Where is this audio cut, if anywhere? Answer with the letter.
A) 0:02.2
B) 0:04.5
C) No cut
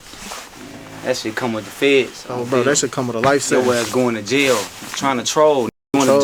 C